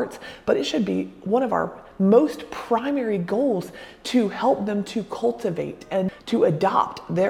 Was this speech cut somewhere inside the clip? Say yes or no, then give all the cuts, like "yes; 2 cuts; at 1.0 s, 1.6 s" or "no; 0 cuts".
yes; 1 cut; at 6.2 s